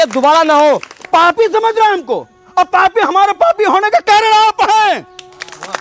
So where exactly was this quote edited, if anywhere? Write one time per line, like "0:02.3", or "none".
0:00.9